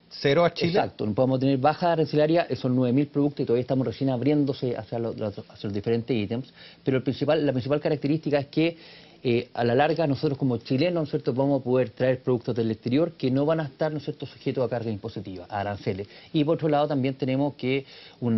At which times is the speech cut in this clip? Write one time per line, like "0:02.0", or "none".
none